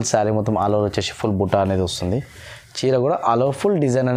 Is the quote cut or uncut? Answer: uncut